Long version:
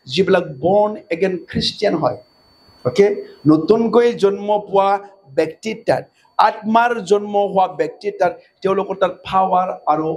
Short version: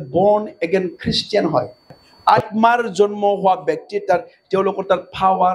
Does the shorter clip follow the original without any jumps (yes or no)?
no